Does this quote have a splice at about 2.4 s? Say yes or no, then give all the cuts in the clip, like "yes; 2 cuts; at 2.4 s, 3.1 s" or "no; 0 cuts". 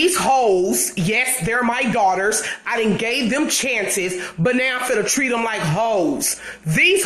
no; 0 cuts